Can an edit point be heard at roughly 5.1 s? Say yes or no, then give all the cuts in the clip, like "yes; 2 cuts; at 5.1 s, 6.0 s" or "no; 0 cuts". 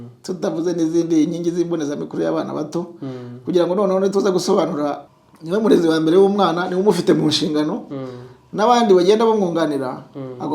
yes; 1 cut; at 5.1 s